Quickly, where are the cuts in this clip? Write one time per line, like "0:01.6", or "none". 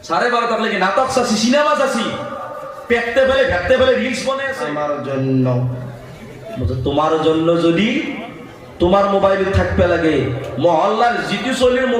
0:04.5